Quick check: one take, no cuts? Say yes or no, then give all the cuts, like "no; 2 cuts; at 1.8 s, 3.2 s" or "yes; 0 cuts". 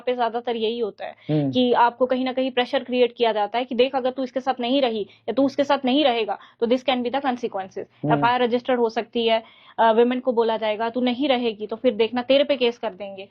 yes; 0 cuts